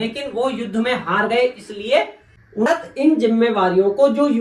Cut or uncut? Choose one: cut